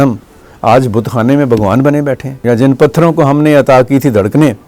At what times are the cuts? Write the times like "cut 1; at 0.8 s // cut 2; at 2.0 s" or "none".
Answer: cut 1; at 2.3 s